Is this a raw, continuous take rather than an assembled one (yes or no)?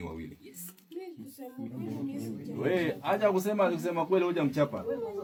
yes